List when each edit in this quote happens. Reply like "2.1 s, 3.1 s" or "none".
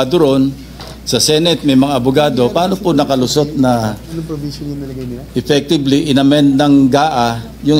none